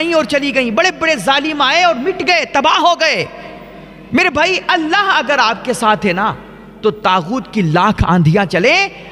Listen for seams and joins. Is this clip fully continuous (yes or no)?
yes